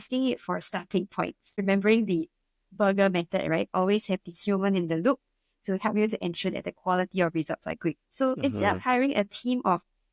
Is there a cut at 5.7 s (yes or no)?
no